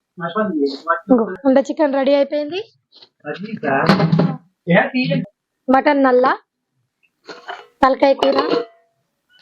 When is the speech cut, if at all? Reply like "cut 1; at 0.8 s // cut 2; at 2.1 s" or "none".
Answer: cut 1; at 1.4 s // cut 2; at 5.1 s